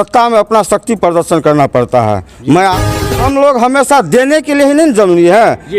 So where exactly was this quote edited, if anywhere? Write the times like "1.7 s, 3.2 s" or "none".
2.7 s

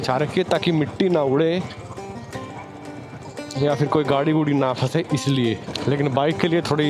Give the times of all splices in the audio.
5.7 s

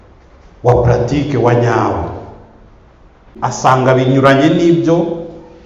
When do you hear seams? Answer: 3.3 s

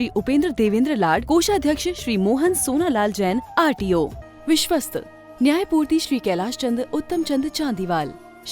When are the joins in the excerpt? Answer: 4.2 s

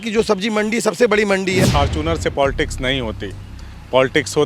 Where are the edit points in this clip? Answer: 1.6 s

